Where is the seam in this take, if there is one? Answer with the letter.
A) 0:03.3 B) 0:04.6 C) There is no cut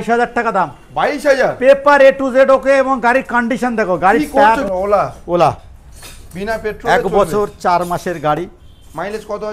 B